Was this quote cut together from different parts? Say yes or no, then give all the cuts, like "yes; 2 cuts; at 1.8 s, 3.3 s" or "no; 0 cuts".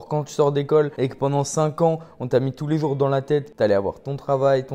yes; 2 cuts; at 0.9 s, 3.5 s